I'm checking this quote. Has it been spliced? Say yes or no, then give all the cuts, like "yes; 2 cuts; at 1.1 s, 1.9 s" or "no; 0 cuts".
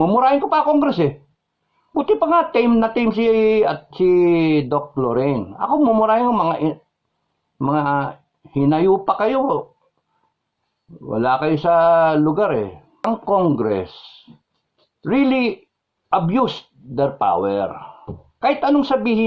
yes; 1 cut; at 13.0 s